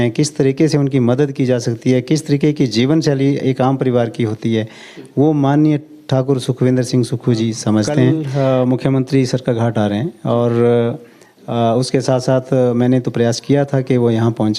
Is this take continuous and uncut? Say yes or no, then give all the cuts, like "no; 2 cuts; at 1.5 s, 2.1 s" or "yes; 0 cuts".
no; 1 cut; at 8.2 s